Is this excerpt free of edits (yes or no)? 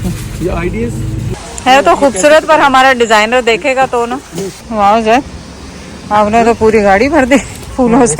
no